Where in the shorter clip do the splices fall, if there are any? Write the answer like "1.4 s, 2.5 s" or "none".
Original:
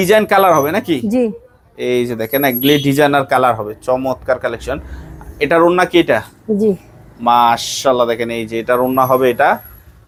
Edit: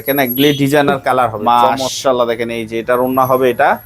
1.4 s